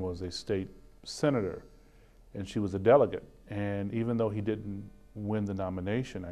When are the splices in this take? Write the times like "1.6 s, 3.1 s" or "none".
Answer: none